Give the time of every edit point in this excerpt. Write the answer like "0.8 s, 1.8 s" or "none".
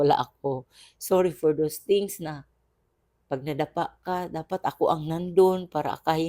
none

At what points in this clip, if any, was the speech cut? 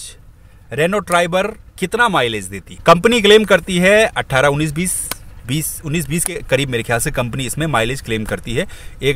none

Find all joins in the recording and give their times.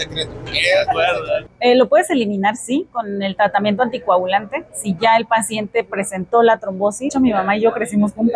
1.5 s, 7.1 s

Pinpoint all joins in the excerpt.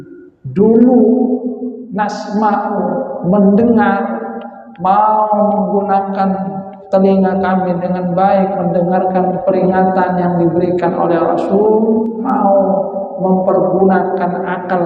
12.2 s

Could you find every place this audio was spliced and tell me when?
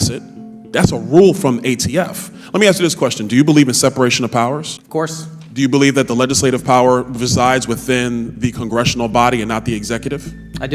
4.7 s

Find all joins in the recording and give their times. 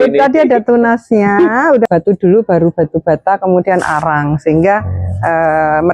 1.8 s

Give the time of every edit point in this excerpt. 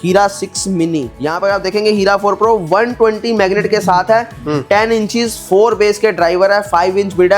1.1 s

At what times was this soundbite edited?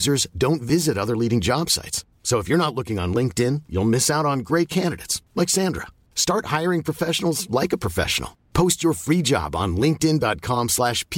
none

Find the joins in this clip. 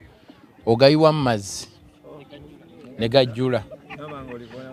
none

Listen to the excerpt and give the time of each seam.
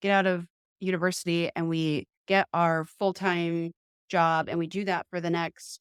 none

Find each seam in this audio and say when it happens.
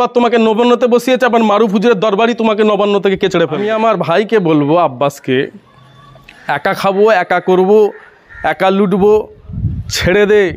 3.6 s

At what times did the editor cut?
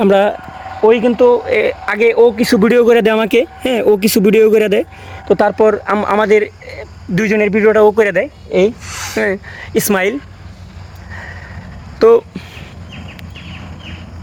none

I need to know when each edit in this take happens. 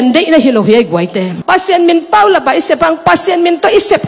1.4 s

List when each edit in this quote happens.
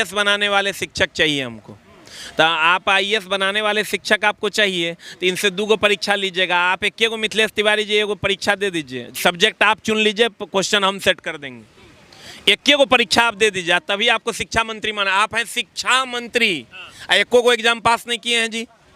none

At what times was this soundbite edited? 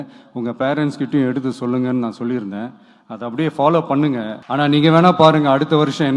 4.4 s

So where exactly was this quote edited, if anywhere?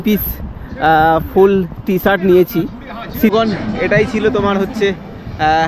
3.3 s

